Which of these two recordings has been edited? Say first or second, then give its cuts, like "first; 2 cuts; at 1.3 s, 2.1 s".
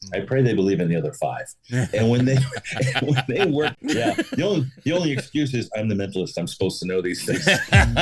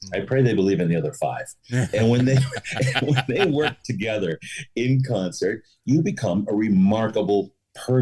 first; 1 cut; at 3.8 s